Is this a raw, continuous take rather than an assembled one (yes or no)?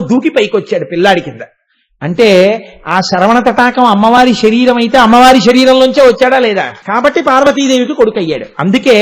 no